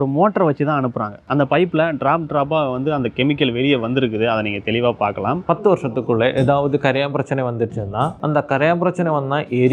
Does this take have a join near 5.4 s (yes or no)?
yes